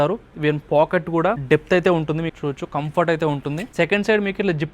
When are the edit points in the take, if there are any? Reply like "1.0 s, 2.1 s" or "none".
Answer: 1.4 s, 2.3 s